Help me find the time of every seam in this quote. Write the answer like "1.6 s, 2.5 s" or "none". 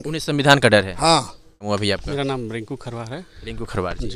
1.6 s